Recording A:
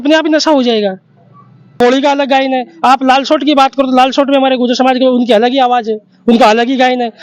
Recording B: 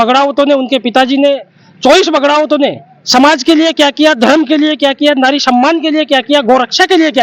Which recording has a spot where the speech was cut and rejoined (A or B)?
A